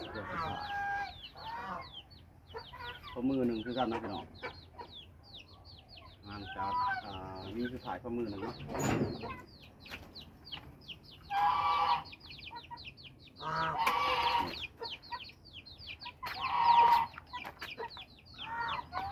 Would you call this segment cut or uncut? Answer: uncut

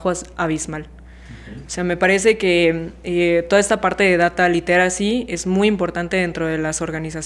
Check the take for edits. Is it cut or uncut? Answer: uncut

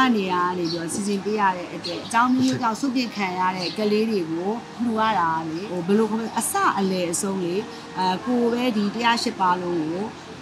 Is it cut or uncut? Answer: cut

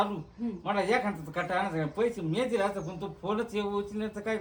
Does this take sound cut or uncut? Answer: uncut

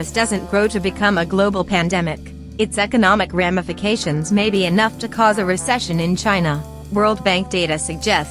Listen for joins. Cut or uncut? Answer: uncut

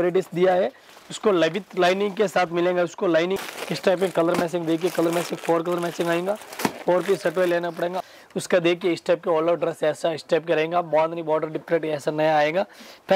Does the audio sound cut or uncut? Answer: cut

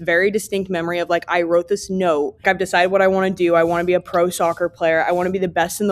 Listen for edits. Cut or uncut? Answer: cut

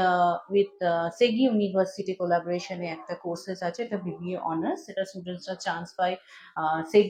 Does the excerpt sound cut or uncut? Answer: uncut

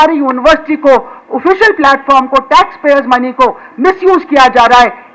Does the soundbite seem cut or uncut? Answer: uncut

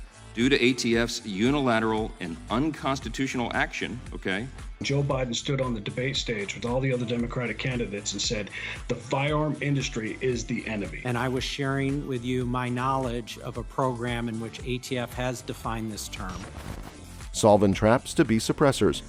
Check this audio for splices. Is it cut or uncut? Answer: uncut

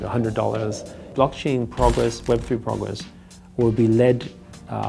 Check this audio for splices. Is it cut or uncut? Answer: cut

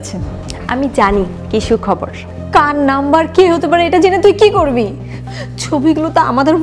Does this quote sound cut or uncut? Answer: cut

